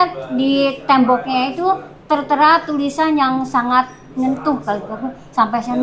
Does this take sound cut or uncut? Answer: uncut